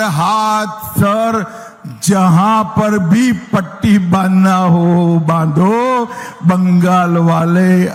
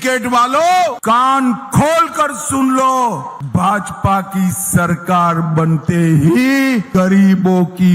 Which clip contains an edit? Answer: second; 3 cuts; at 1.0 s, 3.3 s, 6.9 s

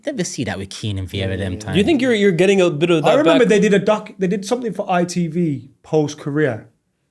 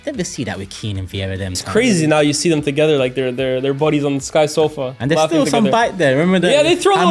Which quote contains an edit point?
second; 1 cut; at 1.6 s

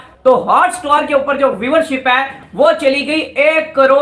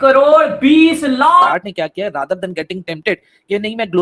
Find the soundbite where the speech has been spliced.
second; 1 cut; at 1.5 s

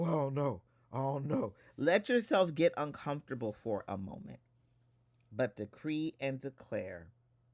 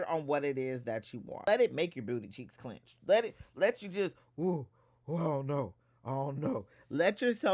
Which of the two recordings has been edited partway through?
second; 1 cut; at 1.4 s

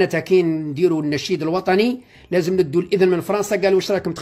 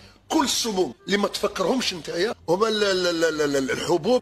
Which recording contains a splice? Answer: second; 1 cut; at 2.4 s

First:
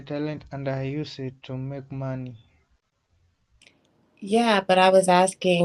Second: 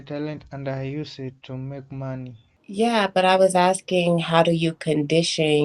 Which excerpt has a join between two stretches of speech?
second; 1 cut; at 2.5 s

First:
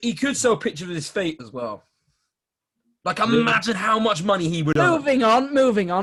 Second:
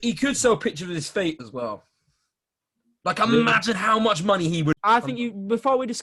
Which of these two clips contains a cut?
second; 1 cut; at 4.7 s

